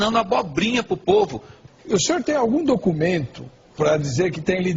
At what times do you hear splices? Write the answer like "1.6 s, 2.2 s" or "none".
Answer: none